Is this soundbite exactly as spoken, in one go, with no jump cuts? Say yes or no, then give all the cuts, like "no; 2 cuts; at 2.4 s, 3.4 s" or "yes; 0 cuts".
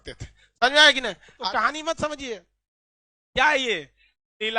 no; 1 cut; at 1.3 s